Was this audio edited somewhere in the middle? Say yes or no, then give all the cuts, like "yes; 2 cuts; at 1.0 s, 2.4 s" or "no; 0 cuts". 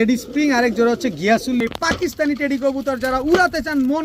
yes; 1 cut; at 1.6 s